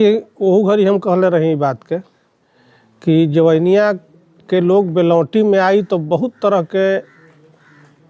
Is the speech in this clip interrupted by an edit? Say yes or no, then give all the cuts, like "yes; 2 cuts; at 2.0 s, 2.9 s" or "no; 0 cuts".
no; 0 cuts